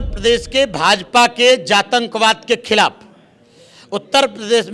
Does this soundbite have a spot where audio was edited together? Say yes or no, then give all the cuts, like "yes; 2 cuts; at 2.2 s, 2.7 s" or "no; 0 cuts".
no; 0 cuts